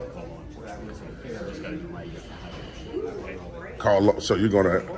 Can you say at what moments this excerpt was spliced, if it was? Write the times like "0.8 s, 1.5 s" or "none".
none